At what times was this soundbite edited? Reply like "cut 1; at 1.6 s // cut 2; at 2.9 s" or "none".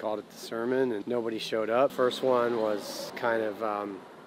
cut 1; at 1.0 s // cut 2; at 1.9 s // cut 3; at 3.0 s